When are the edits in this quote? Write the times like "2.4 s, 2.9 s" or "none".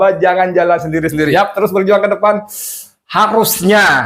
1.3 s

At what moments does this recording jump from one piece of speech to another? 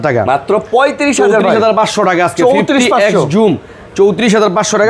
none

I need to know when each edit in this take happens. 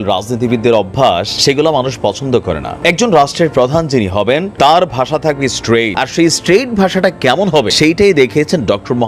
1.3 s, 2.7 s, 4.5 s, 5.9 s, 7.7 s

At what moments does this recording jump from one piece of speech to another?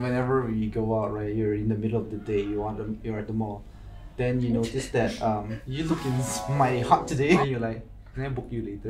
5.6 s, 7.4 s

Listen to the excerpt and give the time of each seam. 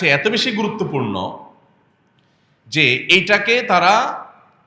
none

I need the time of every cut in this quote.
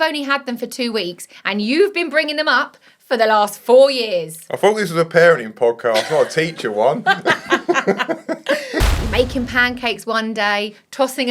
8.8 s

